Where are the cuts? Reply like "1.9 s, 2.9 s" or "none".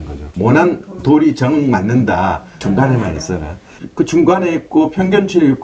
2.5 s